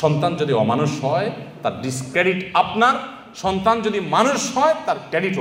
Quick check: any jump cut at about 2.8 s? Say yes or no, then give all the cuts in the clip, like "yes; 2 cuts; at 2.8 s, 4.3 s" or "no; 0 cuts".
no; 0 cuts